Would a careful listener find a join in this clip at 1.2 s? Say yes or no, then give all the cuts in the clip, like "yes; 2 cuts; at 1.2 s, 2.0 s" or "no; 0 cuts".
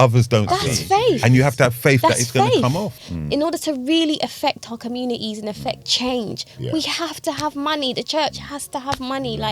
no; 1 cut; at 3.0 s